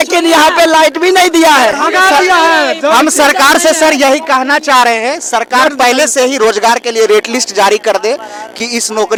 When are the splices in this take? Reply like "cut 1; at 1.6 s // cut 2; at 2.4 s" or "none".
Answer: none

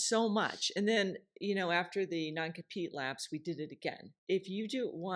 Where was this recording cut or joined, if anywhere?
cut 1; at 4.1 s

